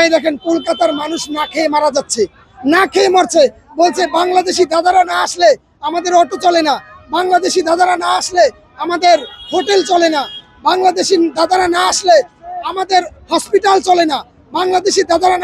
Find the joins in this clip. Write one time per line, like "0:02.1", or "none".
none